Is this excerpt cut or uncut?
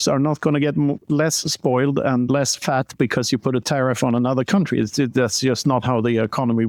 uncut